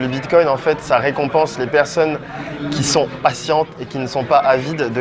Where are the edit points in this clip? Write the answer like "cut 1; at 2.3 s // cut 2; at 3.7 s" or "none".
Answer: none